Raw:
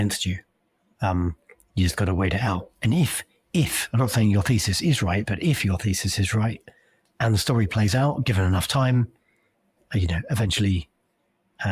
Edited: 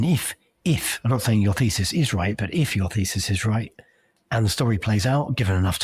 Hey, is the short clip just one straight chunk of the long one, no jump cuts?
yes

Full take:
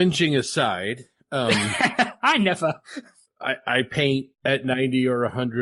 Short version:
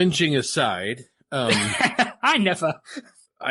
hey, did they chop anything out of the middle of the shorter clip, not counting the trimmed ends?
no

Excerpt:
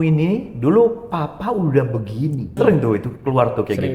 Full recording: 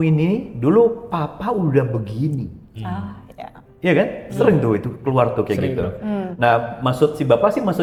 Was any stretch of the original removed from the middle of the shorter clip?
yes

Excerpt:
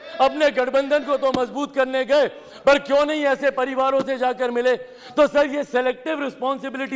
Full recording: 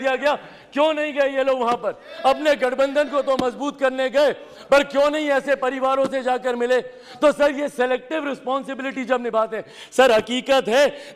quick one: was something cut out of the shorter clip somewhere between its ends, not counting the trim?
no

